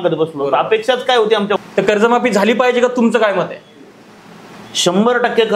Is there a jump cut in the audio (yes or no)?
yes